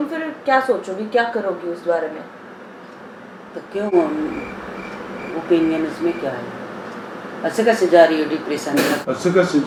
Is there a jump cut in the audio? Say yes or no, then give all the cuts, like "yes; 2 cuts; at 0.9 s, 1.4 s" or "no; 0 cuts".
no; 0 cuts